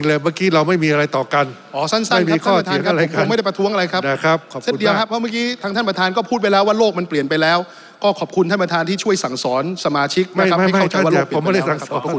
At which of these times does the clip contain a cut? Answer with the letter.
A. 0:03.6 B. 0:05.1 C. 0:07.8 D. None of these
D